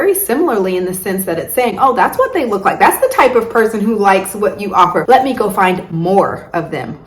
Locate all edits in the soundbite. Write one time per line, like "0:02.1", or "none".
0:05.0